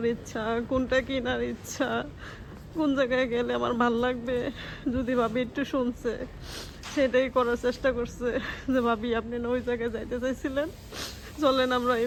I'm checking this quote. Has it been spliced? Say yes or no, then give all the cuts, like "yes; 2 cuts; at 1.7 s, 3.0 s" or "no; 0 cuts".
no; 0 cuts